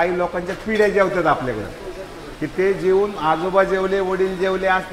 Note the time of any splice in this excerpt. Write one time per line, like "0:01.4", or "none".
none

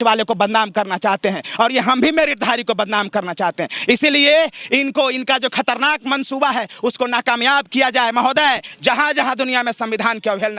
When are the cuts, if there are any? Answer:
none

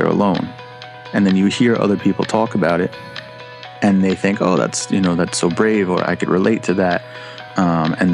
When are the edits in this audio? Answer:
none

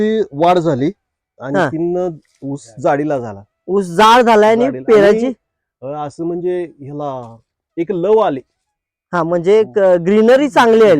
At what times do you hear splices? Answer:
none

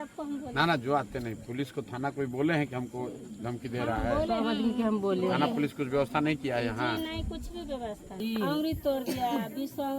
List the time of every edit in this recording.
0:08.2

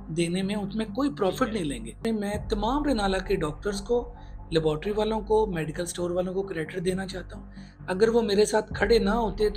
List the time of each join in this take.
0:02.0

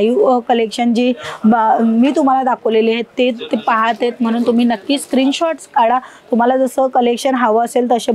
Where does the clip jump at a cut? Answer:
none

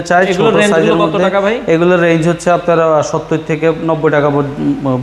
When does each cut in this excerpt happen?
none

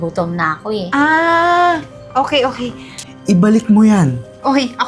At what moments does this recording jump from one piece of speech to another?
0:03.1

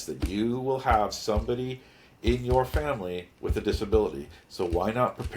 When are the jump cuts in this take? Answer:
none

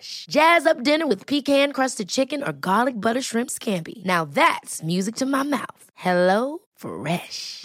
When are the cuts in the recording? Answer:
none

